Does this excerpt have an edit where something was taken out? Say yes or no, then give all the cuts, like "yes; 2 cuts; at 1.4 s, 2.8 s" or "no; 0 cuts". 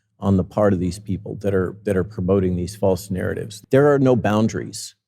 yes; 1 cut; at 3.5 s